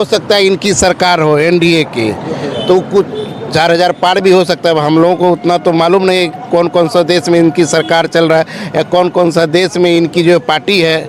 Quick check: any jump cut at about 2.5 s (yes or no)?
no